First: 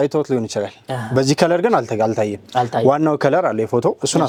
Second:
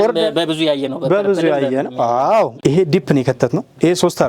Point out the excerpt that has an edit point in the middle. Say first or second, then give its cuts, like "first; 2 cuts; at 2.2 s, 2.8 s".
second; 1 cut; at 2.5 s